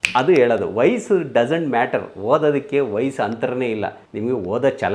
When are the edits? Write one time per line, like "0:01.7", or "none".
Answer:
none